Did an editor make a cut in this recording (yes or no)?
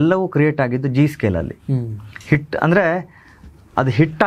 no